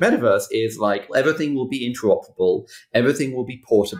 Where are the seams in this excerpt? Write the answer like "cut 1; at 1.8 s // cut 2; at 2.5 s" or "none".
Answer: cut 1; at 1.1 s